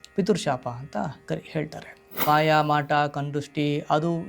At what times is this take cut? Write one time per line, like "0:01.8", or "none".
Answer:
0:02.2